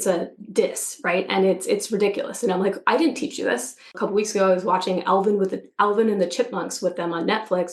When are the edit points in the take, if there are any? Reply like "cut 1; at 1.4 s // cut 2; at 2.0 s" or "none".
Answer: cut 1; at 4.0 s